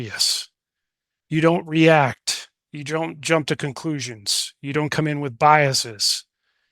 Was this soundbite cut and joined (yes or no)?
yes